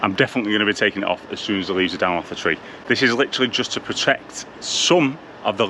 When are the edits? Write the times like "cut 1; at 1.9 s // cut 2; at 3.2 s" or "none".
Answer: none